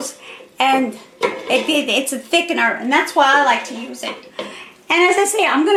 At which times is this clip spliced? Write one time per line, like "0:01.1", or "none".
none

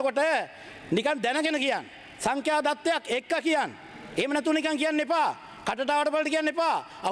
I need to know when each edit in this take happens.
none

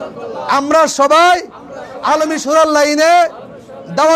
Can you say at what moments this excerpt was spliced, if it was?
none

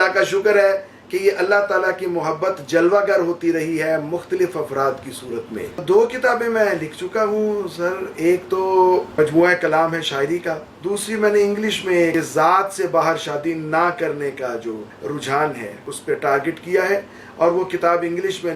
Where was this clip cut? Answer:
0:05.8
0:09.1
0:10.7
0:12.1
0:14.9
0:15.9

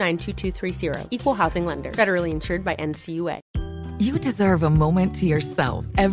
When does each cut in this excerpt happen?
0:03.4

